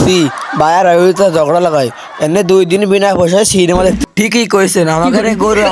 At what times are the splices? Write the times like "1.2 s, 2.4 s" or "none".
4.0 s